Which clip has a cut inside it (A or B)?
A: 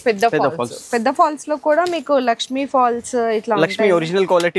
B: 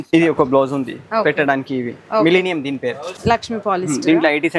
B